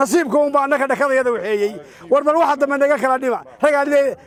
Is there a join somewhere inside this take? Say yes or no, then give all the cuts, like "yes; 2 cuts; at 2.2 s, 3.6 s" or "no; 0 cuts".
no; 0 cuts